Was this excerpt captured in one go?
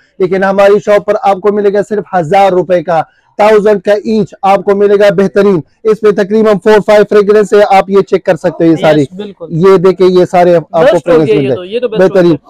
yes; 0 cuts

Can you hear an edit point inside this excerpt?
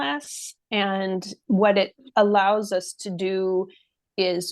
yes; 1 cut; at 1.3 s

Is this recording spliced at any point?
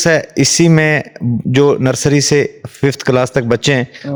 no; 0 cuts

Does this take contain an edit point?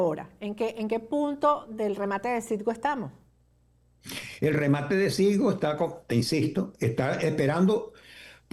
no; 0 cuts

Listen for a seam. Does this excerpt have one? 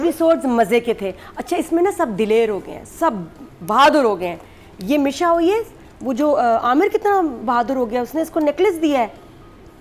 no; 0 cuts

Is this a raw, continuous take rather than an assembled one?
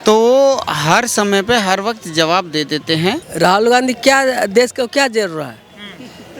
no; 1 cut; at 3.2 s

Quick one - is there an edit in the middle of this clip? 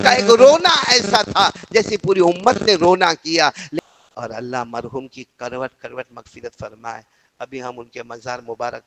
yes; 1 cut; at 3.7 s

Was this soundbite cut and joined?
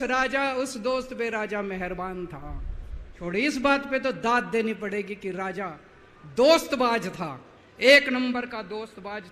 yes; 1 cut; at 3.2 s

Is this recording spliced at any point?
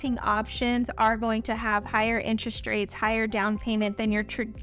no; 0 cuts

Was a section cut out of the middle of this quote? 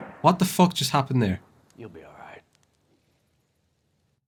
no; 0 cuts

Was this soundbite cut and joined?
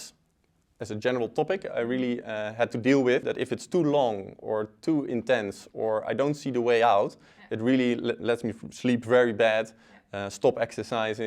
yes; 1 cut; at 3.2 s

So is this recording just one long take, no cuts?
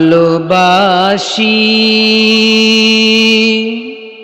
yes; 0 cuts

